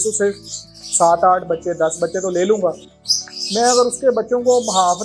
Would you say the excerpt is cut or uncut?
uncut